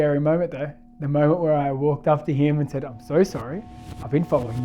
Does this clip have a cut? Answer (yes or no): no